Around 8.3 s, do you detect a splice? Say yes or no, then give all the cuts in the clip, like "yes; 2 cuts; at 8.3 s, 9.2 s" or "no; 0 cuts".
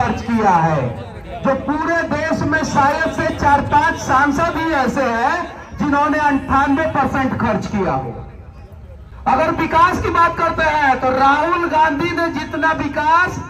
no; 0 cuts